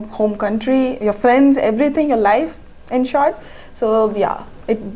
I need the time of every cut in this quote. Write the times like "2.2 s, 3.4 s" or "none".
none